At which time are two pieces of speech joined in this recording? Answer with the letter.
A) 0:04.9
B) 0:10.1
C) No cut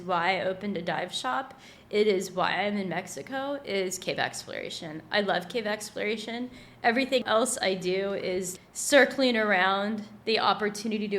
B